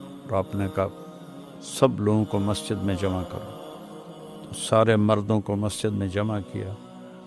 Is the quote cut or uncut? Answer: uncut